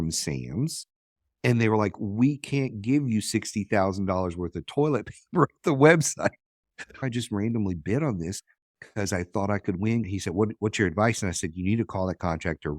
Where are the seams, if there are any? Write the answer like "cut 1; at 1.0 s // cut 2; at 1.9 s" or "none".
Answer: cut 1; at 6.9 s // cut 2; at 10.1 s